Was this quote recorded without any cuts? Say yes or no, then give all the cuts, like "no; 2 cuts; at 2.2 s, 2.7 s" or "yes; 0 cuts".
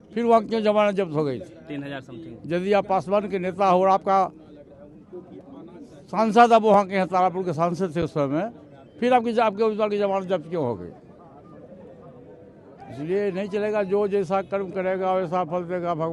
yes; 0 cuts